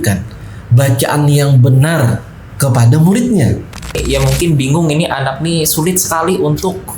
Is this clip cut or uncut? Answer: cut